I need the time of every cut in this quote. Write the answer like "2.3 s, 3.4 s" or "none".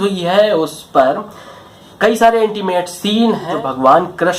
3.4 s